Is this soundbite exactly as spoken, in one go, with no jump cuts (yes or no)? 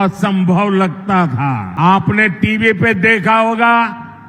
no